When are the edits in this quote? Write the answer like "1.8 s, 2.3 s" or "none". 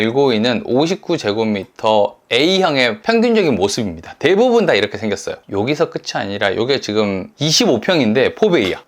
5.4 s, 7.3 s